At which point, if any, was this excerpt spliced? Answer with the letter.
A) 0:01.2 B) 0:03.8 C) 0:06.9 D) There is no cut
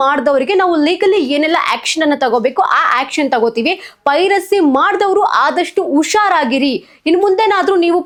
D